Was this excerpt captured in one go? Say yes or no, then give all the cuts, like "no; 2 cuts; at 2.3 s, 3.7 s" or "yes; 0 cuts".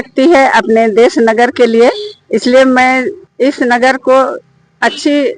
no; 1 cut; at 3.2 s